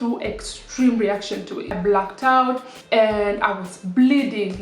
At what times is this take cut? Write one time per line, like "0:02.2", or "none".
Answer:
0:01.8
0:02.7